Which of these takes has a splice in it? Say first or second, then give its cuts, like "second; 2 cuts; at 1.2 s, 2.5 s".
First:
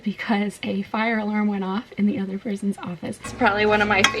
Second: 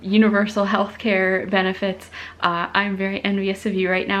first; 1 cut; at 3.3 s